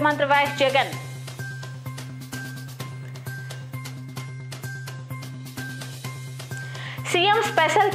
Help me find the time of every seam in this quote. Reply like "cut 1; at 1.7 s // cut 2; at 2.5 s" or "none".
none